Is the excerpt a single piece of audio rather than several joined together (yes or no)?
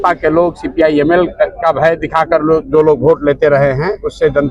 yes